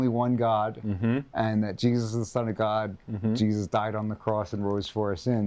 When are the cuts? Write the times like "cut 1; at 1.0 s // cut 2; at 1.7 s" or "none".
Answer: none